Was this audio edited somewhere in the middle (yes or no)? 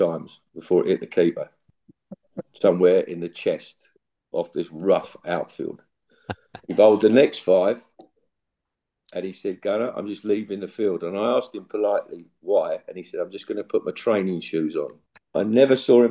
yes